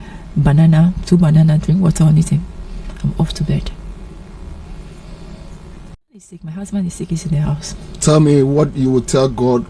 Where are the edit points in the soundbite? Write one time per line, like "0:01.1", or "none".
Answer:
0:06.4